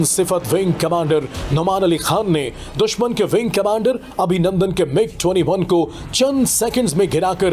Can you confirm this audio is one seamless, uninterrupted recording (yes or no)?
yes